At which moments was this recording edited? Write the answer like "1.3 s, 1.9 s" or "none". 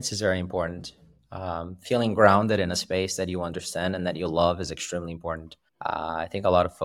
none